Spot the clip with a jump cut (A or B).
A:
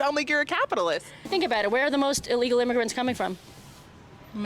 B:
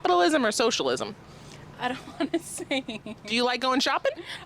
A